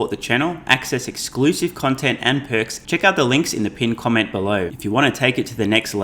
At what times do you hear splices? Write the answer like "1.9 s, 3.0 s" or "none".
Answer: 2.8 s, 4.7 s